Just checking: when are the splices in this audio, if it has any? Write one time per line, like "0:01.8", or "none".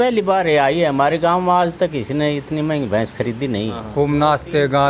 0:03.8